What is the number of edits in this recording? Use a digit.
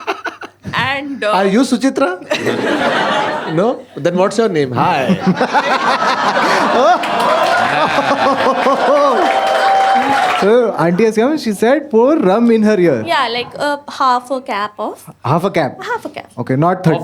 1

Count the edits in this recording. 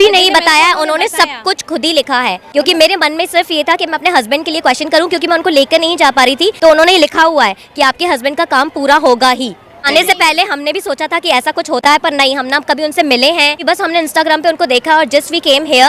0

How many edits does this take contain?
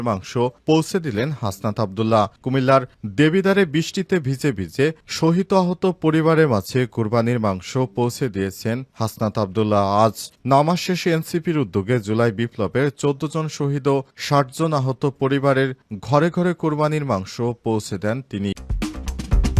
1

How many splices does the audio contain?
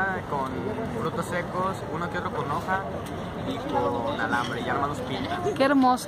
0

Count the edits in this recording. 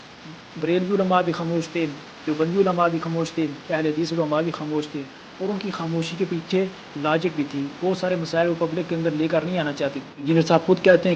1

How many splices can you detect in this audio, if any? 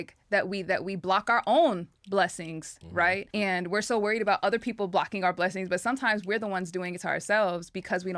1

